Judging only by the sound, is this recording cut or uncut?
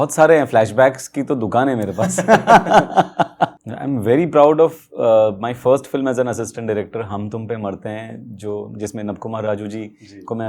cut